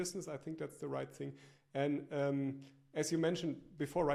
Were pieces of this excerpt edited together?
no; 0 cuts

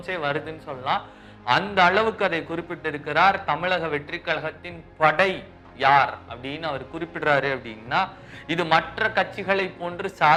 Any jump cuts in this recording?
no; 0 cuts

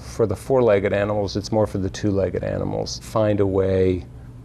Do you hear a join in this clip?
yes; 1 cut; at 3.1 s

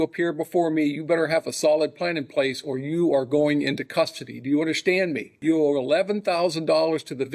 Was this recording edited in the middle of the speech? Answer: yes; 1 cut; at 5.3 s

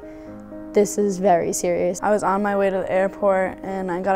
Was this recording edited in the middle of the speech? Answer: yes; 1 cut; at 2.0 s

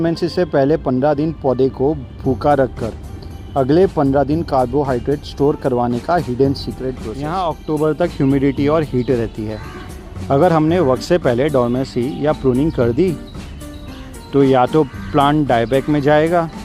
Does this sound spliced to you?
yes; 1 cut; at 7.1 s

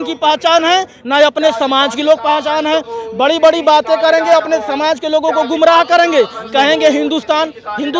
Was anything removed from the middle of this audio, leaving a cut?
no; 0 cuts

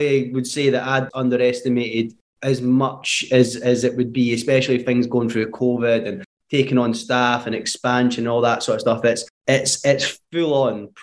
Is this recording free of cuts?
no; 1 cut; at 1.1 s

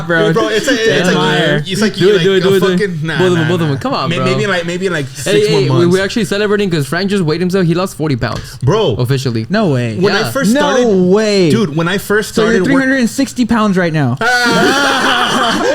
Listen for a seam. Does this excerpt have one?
no; 0 cuts

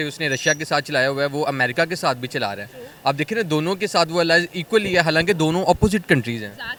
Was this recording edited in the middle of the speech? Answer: no; 0 cuts

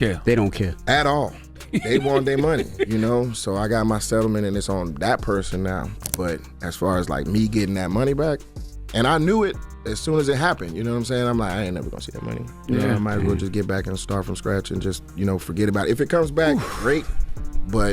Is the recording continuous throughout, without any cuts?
no; 1 cut; at 6.0 s

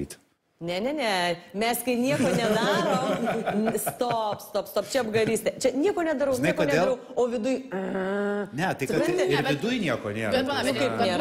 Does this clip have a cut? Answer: no; 0 cuts

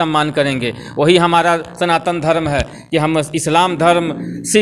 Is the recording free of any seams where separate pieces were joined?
yes; 0 cuts

